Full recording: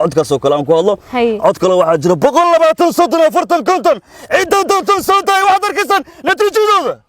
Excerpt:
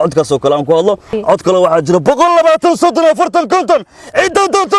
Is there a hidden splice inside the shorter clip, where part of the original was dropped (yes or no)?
yes